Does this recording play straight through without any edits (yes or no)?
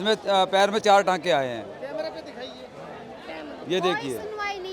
yes